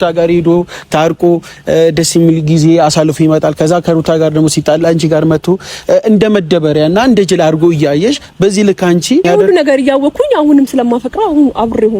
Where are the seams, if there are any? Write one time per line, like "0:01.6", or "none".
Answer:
0:09.3